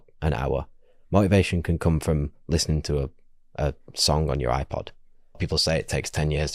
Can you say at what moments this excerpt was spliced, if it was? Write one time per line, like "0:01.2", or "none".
0:05.4